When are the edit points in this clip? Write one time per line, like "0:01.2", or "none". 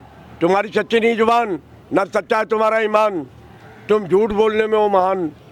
none